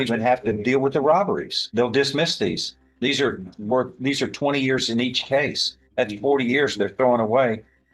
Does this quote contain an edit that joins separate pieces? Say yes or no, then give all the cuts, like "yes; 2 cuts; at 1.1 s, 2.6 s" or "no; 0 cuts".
yes; 1 cut; at 6.7 s